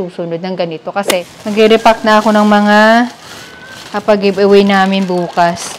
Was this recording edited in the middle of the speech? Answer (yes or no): yes